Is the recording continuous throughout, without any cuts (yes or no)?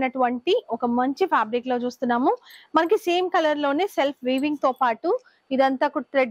yes